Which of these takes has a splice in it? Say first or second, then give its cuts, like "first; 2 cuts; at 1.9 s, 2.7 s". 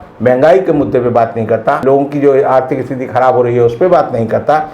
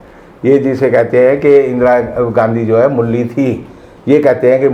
first; 1 cut; at 1.8 s